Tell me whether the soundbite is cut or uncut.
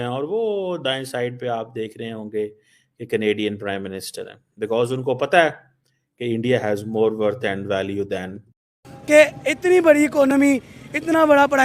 cut